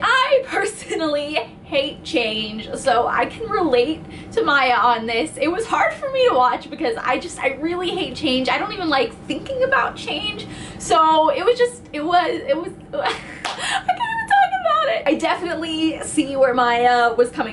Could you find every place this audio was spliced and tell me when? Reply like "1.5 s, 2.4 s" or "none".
2.9 s